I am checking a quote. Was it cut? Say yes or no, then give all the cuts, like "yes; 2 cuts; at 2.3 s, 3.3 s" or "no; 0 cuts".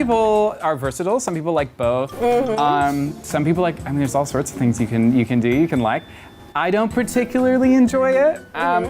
no; 0 cuts